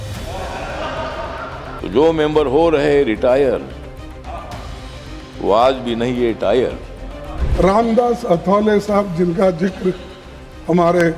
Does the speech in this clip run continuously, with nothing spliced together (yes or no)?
no